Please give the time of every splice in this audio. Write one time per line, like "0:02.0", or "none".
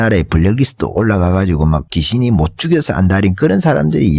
0:01.9